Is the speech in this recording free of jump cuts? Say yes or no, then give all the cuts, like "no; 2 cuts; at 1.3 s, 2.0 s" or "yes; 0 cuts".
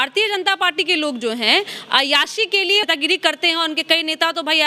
no; 1 cut; at 2.8 s